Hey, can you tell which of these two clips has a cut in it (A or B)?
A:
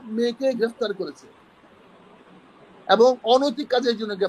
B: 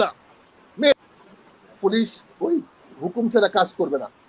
B